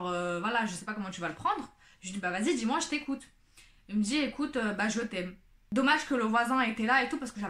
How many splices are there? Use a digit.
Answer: 1